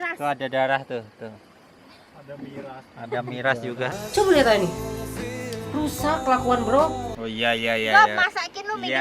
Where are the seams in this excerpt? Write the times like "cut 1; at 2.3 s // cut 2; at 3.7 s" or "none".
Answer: cut 1; at 7.1 s